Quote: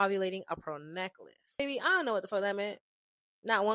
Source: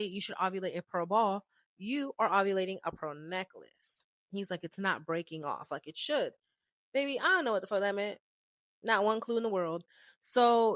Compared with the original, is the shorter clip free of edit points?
no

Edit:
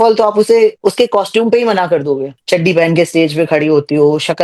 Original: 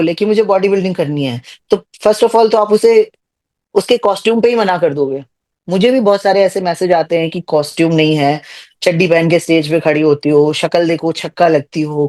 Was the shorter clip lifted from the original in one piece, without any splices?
no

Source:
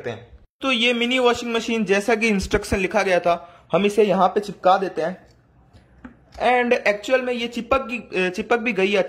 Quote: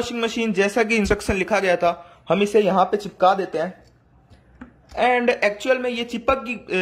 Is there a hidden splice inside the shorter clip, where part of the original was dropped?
yes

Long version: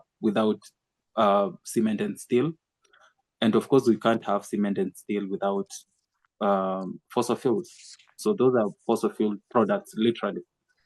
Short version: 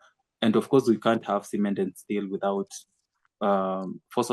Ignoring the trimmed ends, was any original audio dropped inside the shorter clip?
no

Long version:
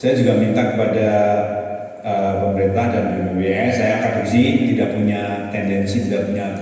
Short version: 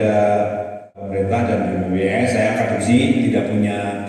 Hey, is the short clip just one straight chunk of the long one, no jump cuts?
no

